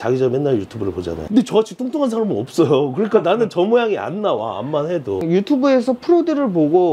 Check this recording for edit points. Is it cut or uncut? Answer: cut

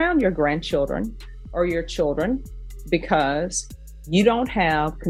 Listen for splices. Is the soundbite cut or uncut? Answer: uncut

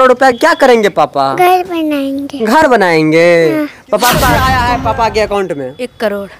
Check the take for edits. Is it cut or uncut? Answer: cut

